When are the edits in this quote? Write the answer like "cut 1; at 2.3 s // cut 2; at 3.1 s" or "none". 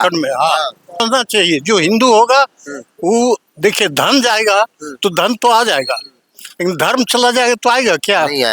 cut 1; at 1.0 s